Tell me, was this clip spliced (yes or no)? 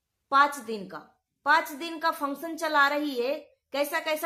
no